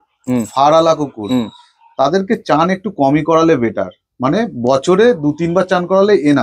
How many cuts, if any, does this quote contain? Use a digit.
0